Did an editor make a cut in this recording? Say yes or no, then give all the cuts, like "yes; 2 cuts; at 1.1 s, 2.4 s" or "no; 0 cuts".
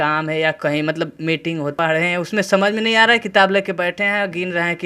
yes; 1 cut; at 1.7 s